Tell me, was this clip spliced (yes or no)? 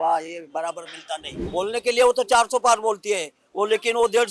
yes